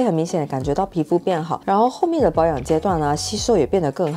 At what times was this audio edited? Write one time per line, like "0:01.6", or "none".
none